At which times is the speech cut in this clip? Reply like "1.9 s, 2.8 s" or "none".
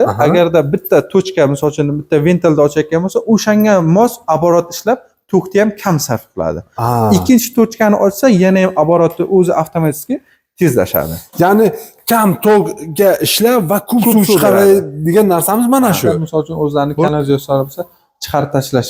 16.2 s